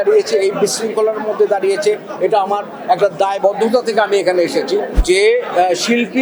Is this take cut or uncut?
cut